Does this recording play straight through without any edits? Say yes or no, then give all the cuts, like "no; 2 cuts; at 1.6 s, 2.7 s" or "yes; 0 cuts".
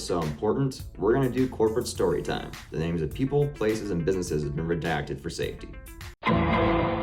yes; 0 cuts